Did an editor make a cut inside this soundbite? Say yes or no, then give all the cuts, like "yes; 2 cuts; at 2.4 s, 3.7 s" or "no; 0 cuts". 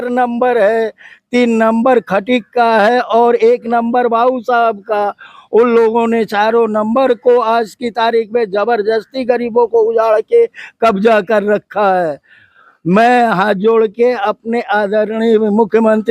no; 0 cuts